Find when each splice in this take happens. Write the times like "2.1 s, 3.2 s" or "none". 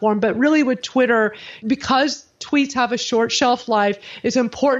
1.6 s